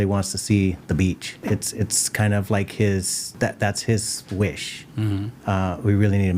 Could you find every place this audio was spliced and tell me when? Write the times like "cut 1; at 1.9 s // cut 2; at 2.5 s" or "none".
cut 1; at 1.4 s // cut 2; at 3.2 s